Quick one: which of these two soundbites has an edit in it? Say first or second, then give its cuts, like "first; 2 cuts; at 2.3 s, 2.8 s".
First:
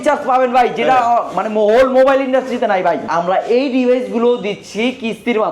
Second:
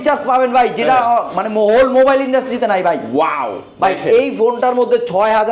first; 1 cut; at 3.1 s